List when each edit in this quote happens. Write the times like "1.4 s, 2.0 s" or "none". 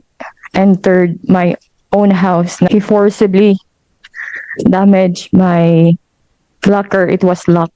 2.7 s